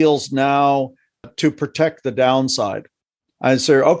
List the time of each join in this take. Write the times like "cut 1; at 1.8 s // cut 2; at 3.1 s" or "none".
cut 1; at 1.3 s